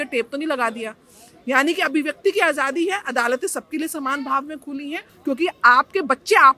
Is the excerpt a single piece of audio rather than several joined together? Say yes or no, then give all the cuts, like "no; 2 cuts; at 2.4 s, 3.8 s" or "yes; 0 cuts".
no; 1 cut; at 5.1 s